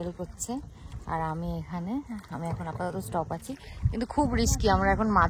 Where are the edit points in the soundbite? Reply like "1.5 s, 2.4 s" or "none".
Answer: none